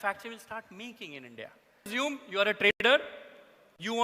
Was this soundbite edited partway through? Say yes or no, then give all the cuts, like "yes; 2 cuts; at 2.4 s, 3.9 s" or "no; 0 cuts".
yes; 1 cut; at 1.9 s